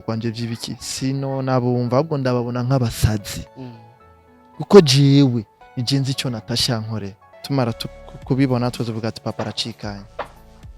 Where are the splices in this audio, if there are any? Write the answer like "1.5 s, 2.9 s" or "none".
7.3 s